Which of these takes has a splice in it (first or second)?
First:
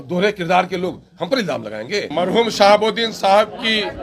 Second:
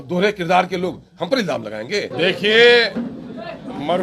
first